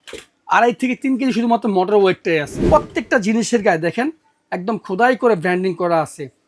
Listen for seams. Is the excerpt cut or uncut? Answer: cut